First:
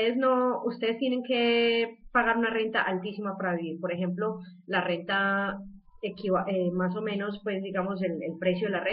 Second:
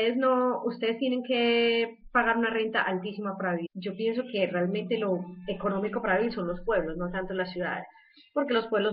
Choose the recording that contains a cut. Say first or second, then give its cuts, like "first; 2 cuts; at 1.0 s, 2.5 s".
first; 1 cut; at 3.7 s